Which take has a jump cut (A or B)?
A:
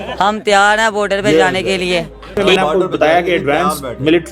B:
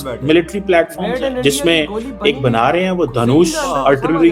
A